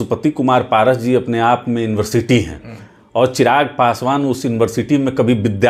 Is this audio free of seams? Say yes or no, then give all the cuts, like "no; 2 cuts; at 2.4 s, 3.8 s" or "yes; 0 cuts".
yes; 0 cuts